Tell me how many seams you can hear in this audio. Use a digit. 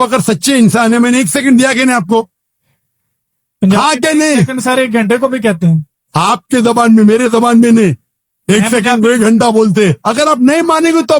1